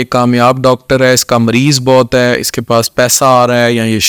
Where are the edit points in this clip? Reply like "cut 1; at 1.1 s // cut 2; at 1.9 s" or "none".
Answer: none